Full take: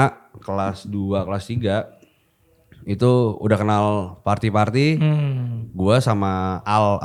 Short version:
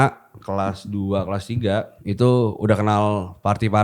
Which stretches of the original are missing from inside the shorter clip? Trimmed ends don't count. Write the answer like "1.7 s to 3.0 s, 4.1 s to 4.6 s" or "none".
1.9 s to 2.8 s

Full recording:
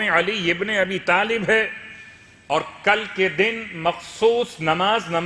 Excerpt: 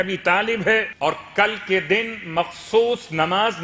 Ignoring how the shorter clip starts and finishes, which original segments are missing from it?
1.7 s to 2.4 s

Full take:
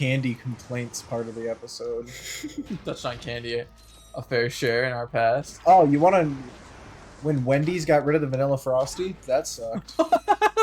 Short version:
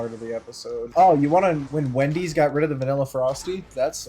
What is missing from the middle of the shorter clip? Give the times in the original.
2.0 s to 5.6 s, 6.4 s to 7.2 s

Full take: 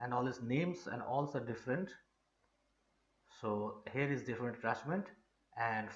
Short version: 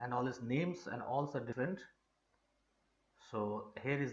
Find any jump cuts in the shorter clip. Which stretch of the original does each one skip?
1.6 s to 1.7 s

